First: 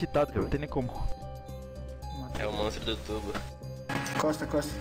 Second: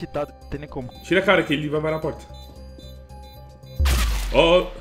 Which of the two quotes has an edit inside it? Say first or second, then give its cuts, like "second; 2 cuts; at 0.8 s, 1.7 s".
second; 1 cut; at 1.0 s